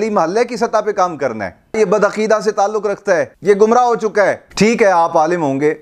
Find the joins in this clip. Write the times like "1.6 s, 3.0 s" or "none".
1.7 s, 3.3 s, 4.4 s

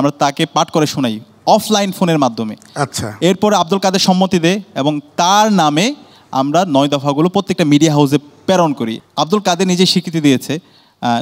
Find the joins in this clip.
9.0 s

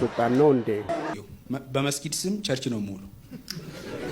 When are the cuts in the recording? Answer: 1.1 s

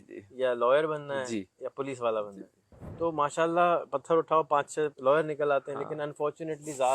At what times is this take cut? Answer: 5.0 s

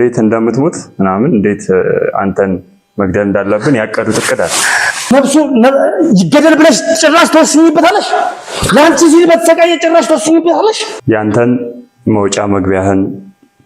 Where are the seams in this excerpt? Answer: 5.1 s, 10.9 s

